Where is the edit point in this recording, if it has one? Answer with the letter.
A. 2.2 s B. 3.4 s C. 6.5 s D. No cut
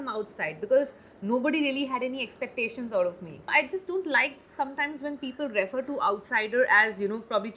B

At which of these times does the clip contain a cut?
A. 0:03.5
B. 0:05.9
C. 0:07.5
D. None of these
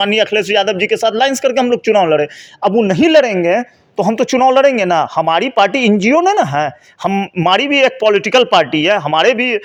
D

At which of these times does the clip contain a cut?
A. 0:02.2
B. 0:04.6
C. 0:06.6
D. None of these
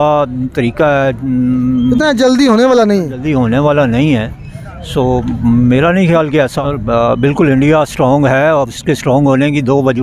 C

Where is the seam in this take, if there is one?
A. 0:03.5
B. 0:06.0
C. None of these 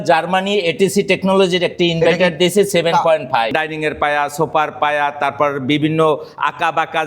A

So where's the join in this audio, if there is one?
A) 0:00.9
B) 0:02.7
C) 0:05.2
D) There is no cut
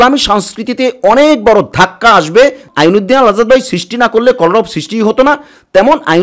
B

